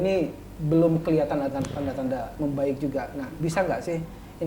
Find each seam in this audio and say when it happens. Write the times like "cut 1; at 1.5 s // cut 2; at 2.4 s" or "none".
cut 1; at 3.4 s